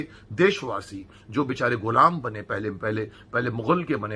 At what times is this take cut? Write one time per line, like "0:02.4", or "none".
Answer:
none

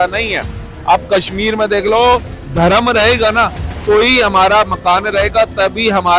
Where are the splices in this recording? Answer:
0:02.3

